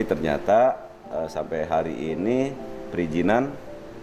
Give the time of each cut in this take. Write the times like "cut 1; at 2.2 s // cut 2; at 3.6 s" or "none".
none